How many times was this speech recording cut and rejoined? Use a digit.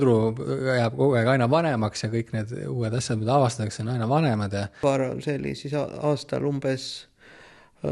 1